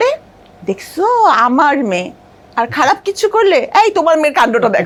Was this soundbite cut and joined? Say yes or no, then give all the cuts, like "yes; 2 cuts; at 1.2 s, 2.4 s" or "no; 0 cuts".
no; 0 cuts